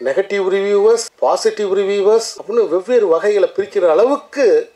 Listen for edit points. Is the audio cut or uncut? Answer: cut